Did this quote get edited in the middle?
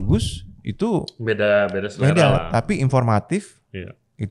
no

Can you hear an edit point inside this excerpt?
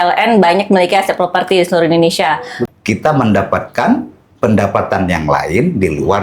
yes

